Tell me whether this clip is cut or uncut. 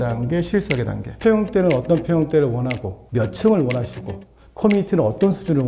cut